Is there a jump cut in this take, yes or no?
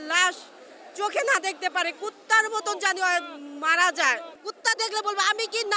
yes